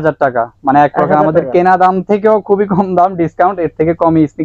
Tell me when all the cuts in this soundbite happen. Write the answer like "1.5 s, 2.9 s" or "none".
none